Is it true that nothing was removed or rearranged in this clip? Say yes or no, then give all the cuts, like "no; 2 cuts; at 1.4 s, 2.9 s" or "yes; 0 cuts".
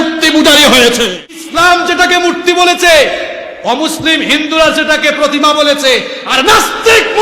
no; 1 cut; at 1.4 s